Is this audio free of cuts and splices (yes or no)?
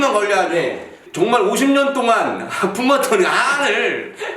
no